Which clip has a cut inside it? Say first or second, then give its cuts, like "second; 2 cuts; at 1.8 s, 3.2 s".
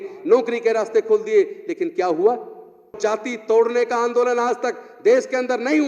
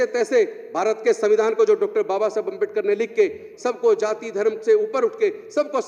first; 1 cut; at 3.0 s